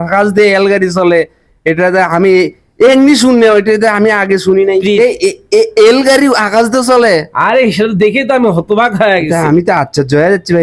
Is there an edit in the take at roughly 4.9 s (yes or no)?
yes